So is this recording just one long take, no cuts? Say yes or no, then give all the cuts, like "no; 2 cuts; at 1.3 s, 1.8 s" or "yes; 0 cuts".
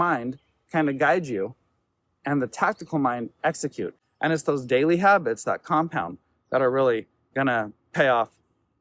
no; 1 cut; at 4.0 s